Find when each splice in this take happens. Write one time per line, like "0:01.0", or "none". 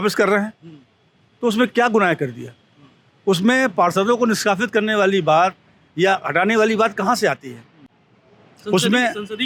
none